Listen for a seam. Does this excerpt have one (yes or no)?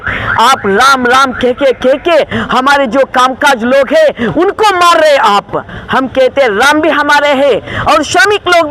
no